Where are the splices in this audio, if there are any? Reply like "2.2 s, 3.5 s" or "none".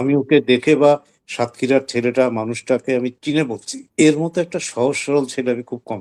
none